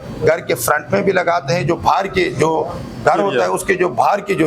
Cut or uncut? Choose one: uncut